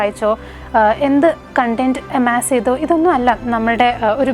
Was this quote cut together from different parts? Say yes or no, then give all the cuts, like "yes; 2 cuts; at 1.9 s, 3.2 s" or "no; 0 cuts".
no; 0 cuts